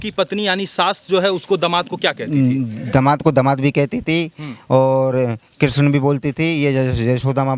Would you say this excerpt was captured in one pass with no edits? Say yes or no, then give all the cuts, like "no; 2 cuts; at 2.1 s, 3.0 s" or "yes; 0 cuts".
yes; 0 cuts